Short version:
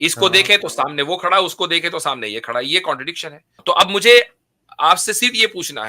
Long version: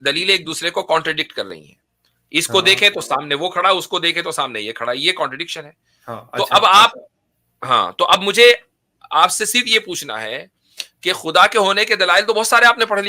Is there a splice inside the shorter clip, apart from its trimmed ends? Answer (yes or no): yes